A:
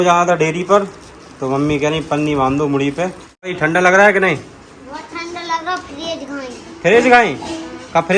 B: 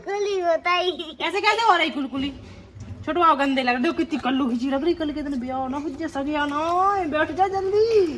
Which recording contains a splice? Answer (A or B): A